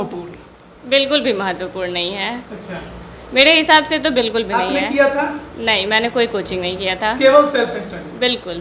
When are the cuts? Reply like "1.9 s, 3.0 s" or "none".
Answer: none